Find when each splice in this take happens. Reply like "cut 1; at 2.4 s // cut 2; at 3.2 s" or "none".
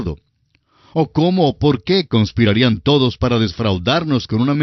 none